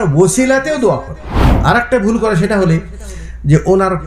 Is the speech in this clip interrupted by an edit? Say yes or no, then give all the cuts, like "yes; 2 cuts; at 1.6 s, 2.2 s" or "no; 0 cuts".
yes; 1 cut; at 1.5 s